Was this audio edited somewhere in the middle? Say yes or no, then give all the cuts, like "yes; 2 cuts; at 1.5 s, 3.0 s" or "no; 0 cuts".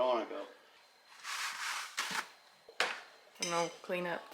yes; 1 cut; at 1.7 s